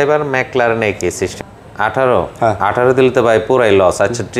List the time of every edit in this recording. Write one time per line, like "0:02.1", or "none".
0:01.3